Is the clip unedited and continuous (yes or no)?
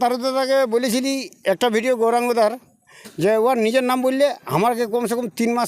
yes